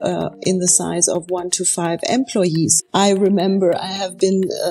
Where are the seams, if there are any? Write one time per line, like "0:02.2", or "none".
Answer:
0:02.8